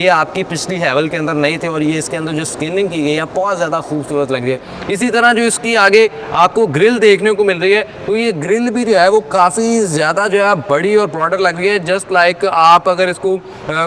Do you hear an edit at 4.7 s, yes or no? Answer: no